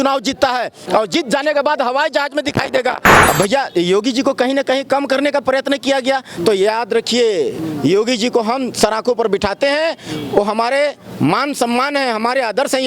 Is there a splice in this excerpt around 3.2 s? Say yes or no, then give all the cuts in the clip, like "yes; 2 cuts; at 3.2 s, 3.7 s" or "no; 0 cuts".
yes; 1 cut; at 3.2 s